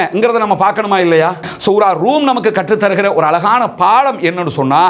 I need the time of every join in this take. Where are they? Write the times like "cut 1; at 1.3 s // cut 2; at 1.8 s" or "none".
cut 1; at 1.5 s